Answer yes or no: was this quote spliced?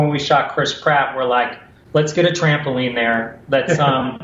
yes